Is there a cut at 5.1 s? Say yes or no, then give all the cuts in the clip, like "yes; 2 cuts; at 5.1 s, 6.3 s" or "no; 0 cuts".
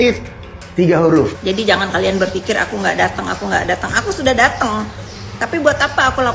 no; 1 cut; at 1.4 s